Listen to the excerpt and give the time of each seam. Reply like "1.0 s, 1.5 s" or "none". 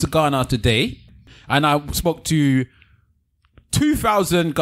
1.2 s